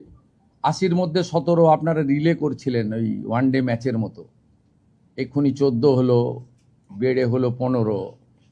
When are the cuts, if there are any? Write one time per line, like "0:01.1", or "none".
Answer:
none